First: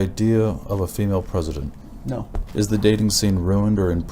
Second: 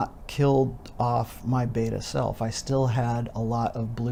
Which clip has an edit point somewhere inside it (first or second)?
first